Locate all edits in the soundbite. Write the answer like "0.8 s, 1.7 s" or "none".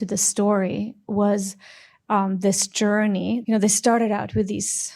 1.0 s, 3.4 s